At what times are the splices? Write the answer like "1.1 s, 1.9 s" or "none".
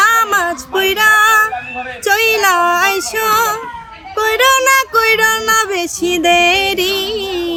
none